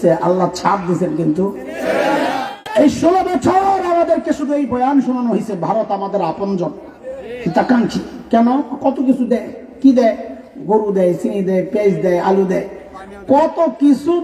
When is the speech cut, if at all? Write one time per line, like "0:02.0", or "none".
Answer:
0:02.5